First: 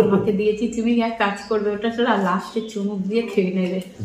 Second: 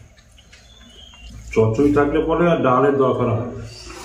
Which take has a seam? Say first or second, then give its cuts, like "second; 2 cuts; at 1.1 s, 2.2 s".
second; 1 cut; at 1.2 s